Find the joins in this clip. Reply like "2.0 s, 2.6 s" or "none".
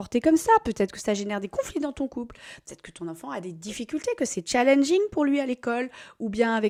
none

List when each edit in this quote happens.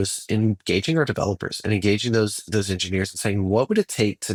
none

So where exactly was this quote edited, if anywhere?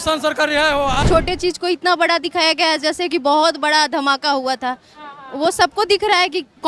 1.0 s

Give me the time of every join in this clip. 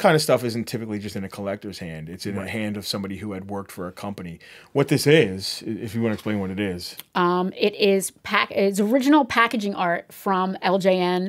none

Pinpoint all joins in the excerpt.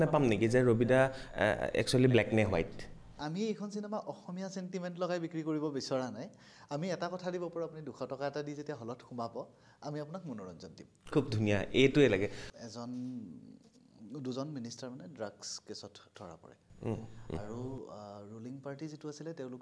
3.2 s, 12.4 s

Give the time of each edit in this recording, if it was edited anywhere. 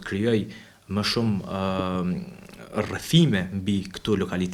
none

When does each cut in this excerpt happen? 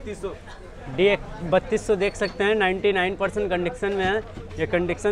none

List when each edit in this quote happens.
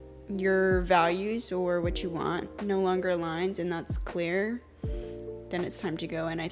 none

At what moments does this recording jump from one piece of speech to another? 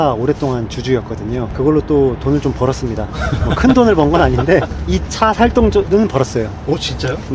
1.5 s, 4.8 s, 5.9 s

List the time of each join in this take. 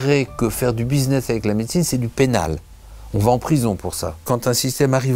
4.2 s

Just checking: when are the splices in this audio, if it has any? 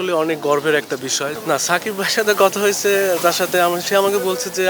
1.3 s

